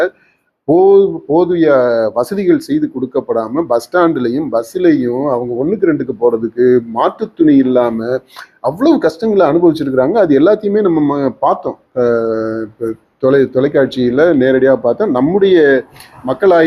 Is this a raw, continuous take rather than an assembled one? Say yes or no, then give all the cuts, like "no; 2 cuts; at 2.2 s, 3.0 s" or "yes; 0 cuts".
yes; 0 cuts